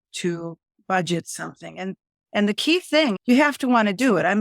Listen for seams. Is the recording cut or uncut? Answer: cut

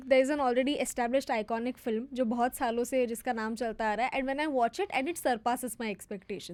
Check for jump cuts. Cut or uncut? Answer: uncut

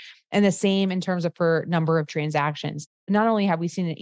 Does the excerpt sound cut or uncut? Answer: cut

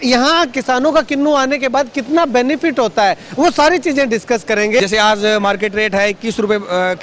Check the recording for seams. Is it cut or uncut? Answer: cut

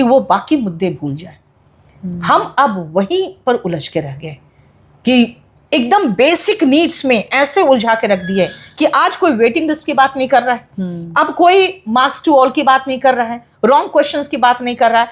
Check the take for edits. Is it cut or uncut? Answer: uncut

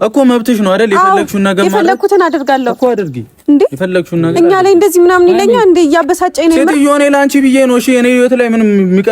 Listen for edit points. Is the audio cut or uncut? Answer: uncut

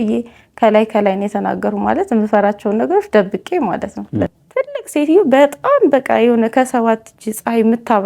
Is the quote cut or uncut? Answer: cut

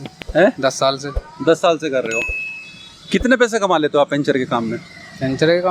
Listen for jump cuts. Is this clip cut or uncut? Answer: uncut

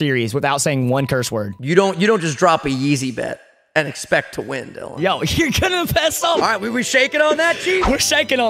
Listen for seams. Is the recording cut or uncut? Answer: cut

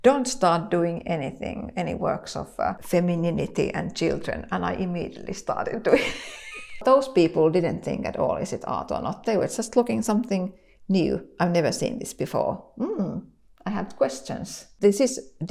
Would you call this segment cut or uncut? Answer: cut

